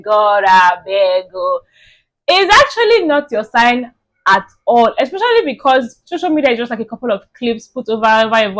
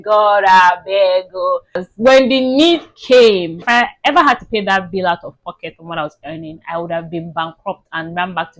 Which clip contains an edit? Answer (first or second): second